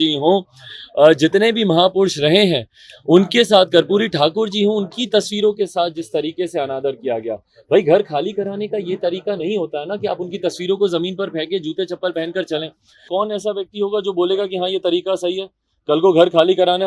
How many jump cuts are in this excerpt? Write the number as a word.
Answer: one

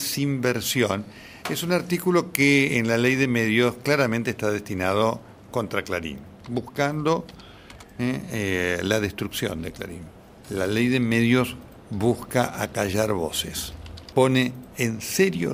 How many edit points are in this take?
zero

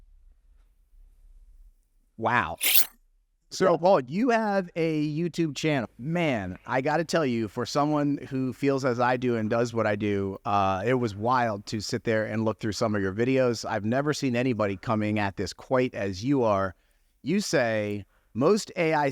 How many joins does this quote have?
two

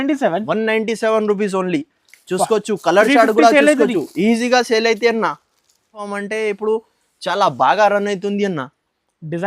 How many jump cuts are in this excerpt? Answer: one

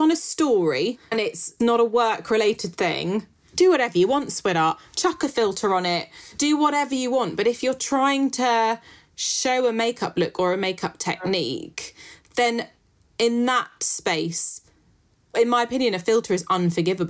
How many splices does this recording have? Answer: four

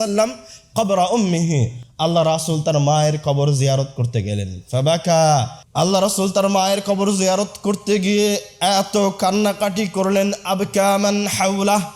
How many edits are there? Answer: one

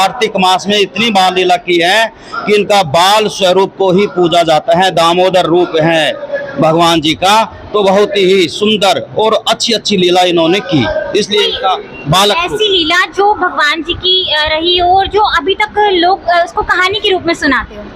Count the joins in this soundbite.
zero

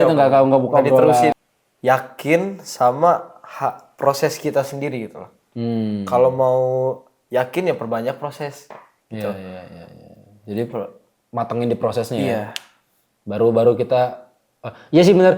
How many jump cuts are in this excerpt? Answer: one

